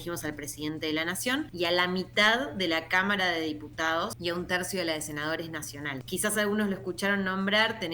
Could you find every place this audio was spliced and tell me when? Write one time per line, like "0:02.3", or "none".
0:01.5
0:04.2
0:06.0